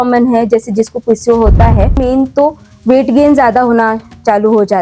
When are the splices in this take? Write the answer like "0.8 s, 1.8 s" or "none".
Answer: 2.0 s